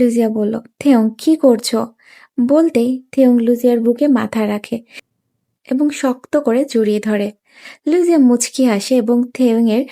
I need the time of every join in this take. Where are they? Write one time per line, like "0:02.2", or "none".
0:05.1